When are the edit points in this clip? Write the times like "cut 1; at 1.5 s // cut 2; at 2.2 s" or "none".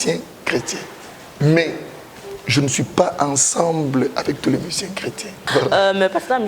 cut 1; at 5.4 s